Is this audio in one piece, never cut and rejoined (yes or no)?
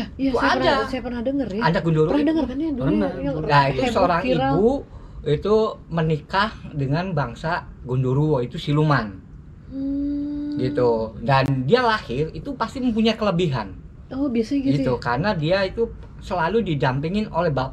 yes